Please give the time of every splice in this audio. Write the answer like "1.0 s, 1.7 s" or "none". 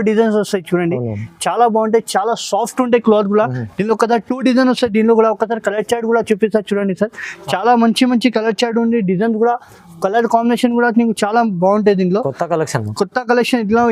none